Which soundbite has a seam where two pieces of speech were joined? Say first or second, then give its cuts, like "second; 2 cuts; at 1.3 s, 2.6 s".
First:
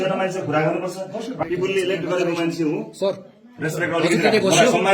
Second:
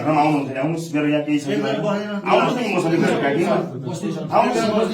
first; 1 cut; at 1.4 s